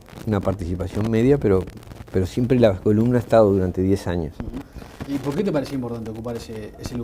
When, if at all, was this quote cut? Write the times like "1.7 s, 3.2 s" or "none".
none